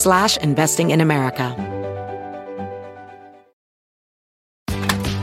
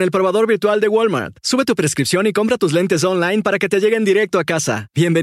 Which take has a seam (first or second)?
first